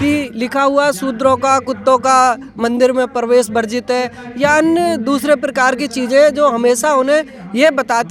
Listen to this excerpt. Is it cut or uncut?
uncut